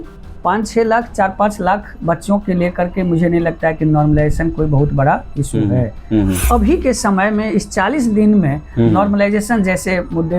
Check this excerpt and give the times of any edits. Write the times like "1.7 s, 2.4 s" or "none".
6.5 s